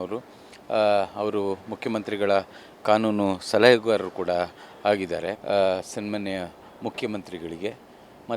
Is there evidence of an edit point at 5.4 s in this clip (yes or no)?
yes